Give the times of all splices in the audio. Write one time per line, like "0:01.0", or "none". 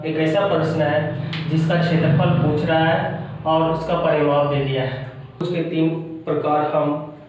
0:05.4

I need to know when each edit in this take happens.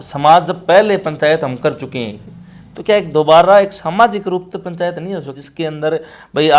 none

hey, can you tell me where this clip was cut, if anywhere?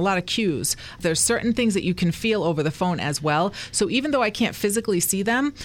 0:01.0

